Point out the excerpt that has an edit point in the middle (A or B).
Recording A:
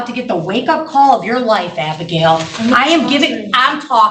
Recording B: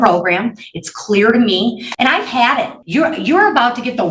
B